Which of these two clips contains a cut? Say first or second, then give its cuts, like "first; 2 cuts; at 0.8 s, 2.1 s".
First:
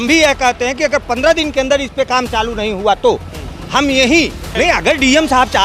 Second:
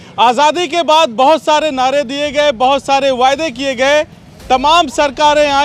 first; 1 cut; at 4.4 s